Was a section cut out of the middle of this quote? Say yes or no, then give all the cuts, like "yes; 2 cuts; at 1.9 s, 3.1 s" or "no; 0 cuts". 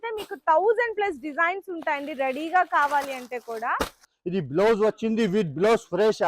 yes; 1 cut; at 4.1 s